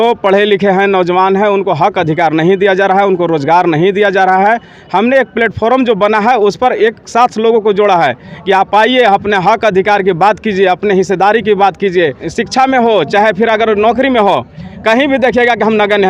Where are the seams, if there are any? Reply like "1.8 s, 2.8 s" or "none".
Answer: 12.2 s